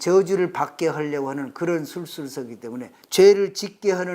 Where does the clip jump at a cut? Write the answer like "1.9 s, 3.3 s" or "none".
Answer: 3.0 s